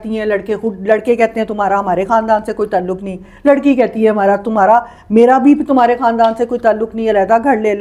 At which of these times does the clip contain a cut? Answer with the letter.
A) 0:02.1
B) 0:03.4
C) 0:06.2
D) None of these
D